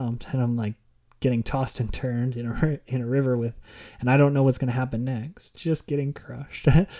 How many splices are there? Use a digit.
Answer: 1